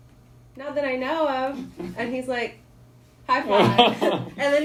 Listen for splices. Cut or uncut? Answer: uncut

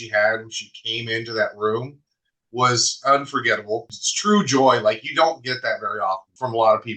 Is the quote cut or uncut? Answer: uncut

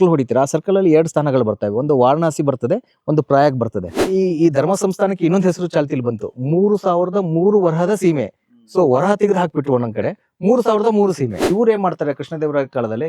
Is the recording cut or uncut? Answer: cut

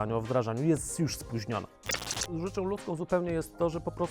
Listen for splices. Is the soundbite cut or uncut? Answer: cut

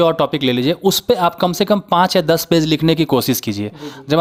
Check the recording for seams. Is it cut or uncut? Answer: uncut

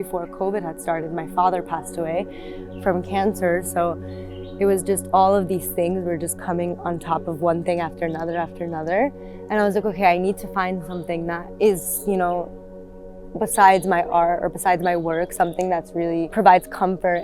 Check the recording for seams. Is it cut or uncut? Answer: cut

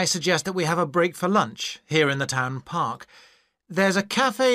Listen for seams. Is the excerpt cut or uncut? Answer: cut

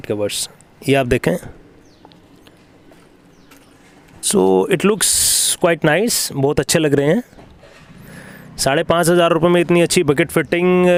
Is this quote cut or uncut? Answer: uncut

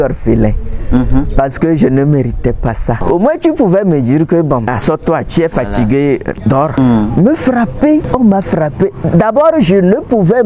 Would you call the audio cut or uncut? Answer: cut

